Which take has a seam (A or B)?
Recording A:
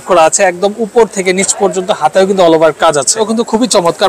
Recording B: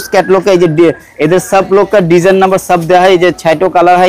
A